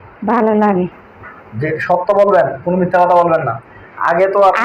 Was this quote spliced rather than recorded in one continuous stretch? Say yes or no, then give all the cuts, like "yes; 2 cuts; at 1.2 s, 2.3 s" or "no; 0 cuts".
no; 0 cuts